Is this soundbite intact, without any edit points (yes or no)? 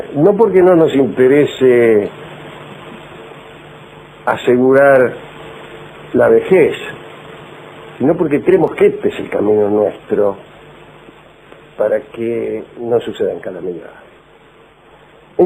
yes